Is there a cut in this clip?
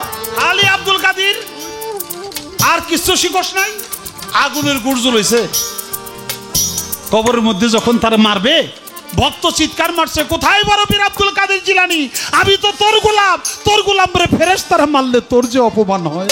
no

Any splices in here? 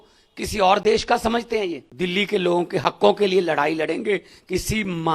yes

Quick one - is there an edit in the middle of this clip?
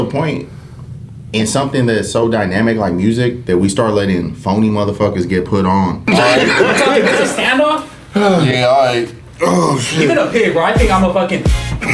yes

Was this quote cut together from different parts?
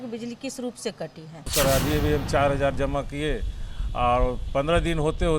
yes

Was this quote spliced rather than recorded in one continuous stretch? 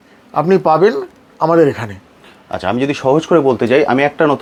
no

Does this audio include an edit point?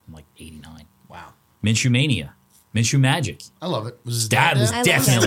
yes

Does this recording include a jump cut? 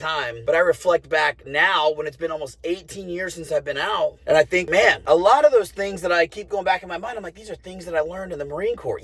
yes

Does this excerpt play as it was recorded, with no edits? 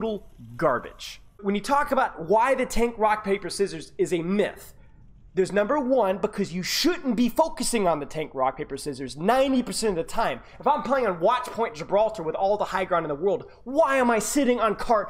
no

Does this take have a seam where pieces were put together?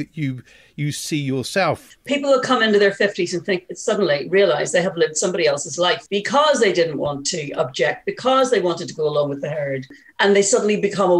yes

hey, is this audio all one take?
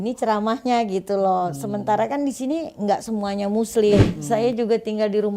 no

